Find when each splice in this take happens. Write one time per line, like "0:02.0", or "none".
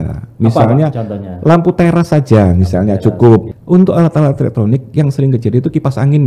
0:03.5